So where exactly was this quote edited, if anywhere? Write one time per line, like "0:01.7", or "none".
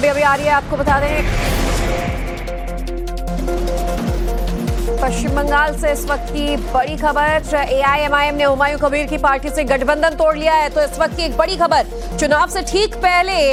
none